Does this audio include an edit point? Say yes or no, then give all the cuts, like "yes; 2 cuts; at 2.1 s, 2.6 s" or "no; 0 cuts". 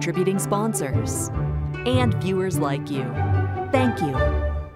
no; 0 cuts